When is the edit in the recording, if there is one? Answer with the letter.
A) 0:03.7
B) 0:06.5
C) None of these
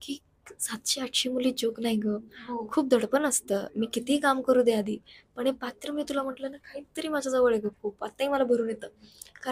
C